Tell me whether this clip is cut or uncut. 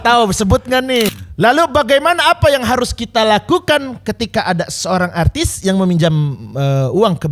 cut